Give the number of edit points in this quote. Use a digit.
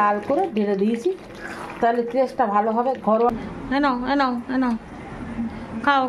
1